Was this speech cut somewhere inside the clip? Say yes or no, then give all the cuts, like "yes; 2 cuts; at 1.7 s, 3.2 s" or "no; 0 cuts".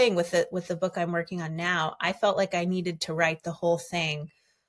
no; 0 cuts